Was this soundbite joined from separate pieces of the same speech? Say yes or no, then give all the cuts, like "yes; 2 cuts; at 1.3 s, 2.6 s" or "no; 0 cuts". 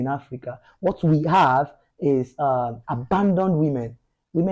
no; 0 cuts